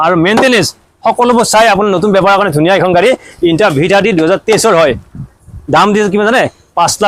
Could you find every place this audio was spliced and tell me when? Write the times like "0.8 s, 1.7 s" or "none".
none